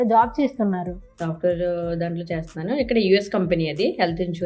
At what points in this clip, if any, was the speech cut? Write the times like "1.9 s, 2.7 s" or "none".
1.1 s